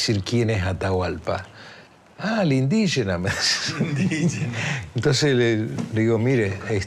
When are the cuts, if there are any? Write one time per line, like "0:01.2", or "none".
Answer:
none